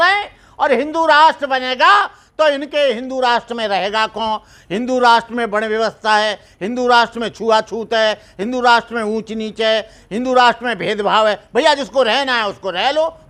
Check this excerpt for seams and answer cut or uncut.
uncut